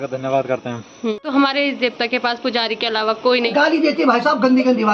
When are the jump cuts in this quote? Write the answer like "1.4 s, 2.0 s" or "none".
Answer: 1.2 s, 3.5 s